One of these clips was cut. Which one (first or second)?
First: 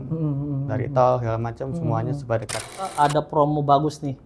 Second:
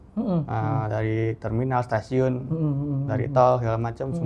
first